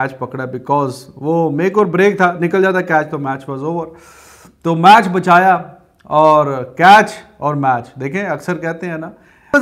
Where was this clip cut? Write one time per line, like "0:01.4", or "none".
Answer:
none